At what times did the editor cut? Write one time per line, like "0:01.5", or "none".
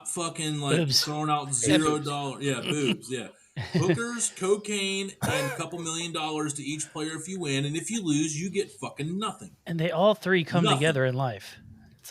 none